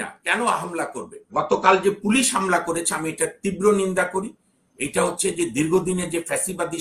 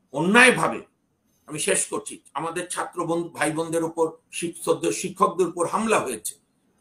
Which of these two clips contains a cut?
first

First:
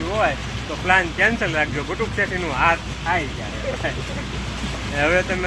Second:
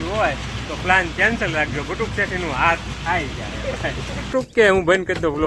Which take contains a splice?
second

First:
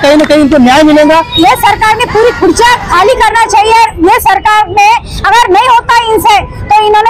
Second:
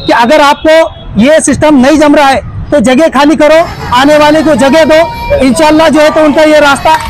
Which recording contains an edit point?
first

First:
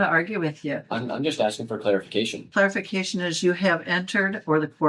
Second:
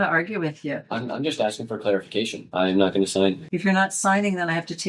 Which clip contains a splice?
second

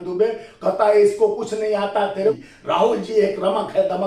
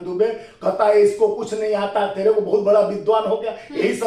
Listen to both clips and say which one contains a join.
first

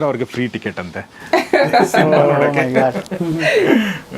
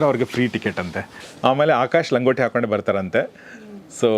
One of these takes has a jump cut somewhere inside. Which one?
second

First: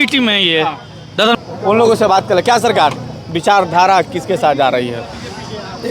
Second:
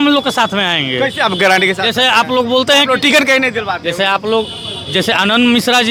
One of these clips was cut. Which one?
first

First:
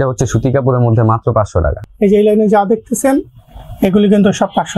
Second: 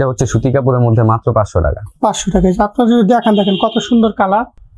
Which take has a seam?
first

